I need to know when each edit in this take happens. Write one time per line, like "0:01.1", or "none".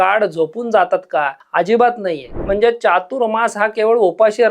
0:01.4
0:02.3